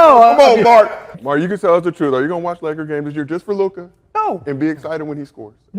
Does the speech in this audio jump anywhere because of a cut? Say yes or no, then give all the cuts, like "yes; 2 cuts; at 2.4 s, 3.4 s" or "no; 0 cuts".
yes; 1 cut; at 1.1 s